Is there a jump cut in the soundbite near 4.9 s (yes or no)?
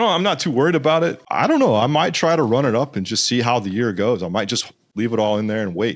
yes